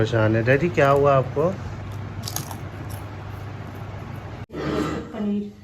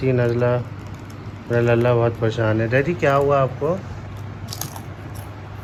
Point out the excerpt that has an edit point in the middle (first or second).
first